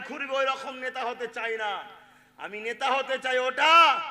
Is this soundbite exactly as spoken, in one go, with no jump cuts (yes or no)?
yes